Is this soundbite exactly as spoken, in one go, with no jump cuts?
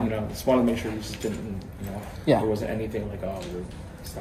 yes; 0 cuts

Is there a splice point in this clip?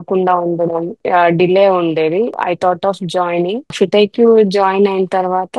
yes; 3 cuts; at 1.0 s, 2.4 s, 3.7 s

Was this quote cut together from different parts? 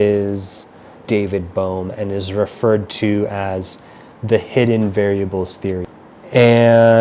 yes; 2 cuts; at 0.9 s, 5.9 s

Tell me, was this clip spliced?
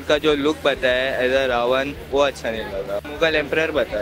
yes; 1 cut; at 3.0 s

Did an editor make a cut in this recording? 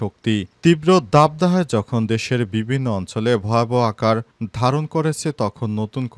no; 0 cuts

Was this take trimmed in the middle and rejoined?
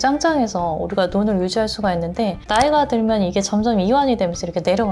no; 0 cuts

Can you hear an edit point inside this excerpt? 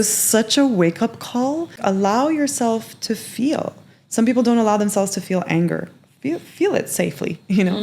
yes; 1 cut; at 1.8 s

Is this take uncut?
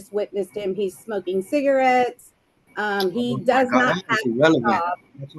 yes; 0 cuts

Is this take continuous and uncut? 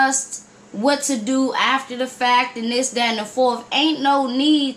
yes; 0 cuts

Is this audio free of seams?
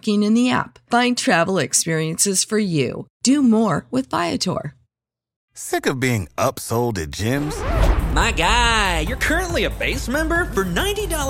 no; 1 cut; at 5.5 s

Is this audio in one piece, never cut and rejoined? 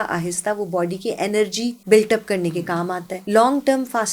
no; 2 cuts; at 1.8 s, 3.1 s

